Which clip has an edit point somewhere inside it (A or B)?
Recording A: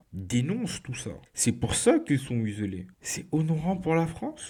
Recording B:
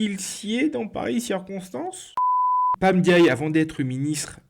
B